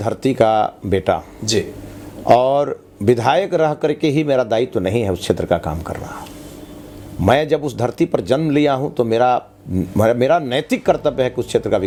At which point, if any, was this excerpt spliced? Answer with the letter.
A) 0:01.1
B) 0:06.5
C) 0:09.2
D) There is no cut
D